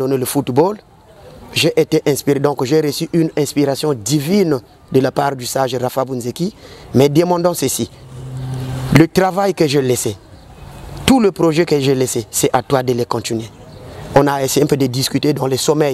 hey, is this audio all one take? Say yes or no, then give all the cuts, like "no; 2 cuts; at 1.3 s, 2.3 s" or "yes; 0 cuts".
yes; 0 cuts